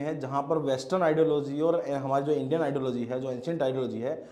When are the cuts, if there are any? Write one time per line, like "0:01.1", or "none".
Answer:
none